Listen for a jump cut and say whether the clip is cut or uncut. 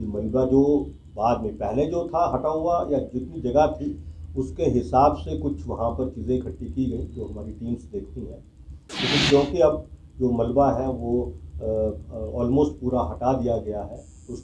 uncut